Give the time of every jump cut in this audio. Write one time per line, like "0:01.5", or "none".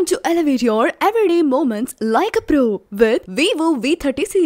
none